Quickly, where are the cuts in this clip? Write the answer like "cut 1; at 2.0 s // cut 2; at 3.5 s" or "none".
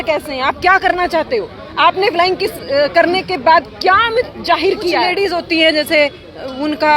cut 1; at 5.1 s